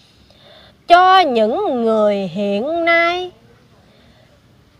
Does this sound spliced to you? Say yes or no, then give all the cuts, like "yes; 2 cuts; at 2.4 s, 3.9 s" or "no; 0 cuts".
no; 0 cuts